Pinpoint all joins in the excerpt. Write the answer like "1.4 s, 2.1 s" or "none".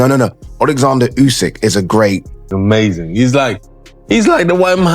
2.4 s